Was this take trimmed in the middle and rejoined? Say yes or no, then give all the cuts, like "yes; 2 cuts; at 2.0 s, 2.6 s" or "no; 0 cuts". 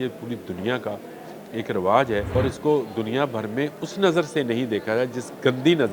yes; 1 cut; at 2.3 s